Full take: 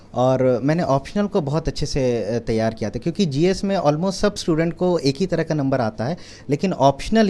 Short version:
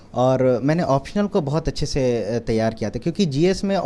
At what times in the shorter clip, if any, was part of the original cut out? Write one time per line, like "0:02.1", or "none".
none